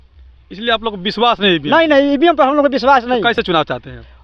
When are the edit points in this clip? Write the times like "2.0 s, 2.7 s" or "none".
none